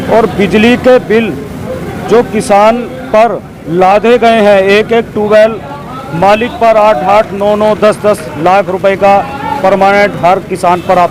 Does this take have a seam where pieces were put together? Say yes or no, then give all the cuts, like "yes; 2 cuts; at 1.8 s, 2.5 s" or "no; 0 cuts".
no; 0 cuts